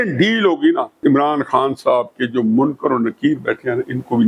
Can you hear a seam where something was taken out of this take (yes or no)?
yes